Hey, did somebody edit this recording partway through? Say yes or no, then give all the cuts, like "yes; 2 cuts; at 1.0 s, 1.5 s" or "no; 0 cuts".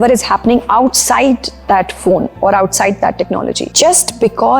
yes; 1 cut; at 3.7 s